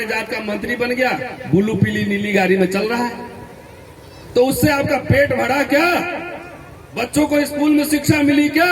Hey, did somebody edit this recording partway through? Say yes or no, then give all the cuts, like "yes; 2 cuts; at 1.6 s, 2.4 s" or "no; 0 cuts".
no; 0 cuts